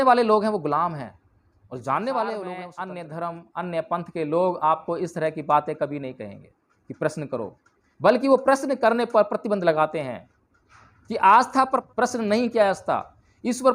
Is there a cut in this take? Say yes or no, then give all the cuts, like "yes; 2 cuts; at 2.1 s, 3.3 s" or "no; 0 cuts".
yes; 2 cuts; at 2.7 s, 11.9 s